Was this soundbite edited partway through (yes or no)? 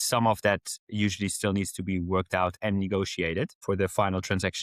yes